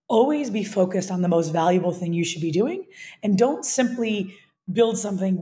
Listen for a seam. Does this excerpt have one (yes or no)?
no